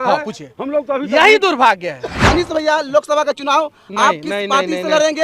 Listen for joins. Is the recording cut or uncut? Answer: cut